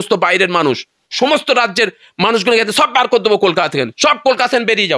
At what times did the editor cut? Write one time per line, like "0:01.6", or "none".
0:01.1